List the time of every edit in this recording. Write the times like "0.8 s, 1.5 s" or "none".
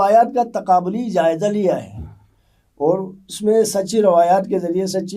none